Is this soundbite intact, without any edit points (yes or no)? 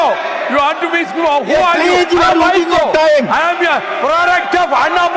yes